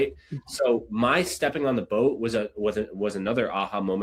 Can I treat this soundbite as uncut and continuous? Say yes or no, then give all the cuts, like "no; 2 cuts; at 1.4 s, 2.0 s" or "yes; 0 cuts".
yes; 0 cuts